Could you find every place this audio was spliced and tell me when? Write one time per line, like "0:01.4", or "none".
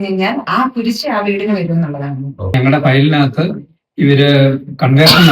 0:02.6